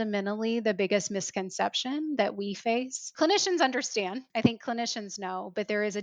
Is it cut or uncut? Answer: cut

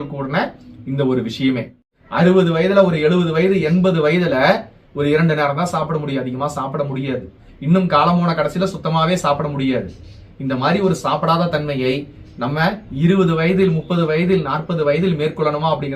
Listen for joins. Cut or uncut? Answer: cut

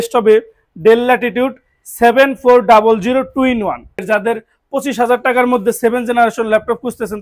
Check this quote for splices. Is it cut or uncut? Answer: cut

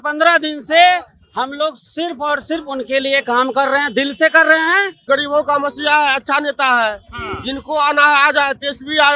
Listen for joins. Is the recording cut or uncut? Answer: cut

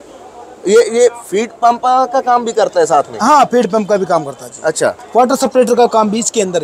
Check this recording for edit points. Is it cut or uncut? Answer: cut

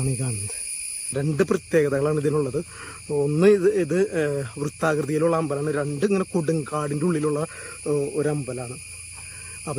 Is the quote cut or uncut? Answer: cut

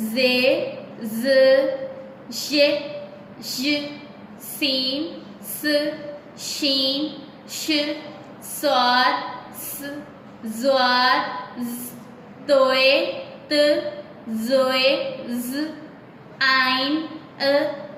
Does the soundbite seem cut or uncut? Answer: uncut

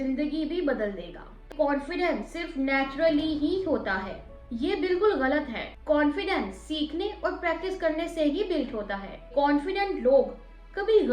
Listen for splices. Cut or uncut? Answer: cut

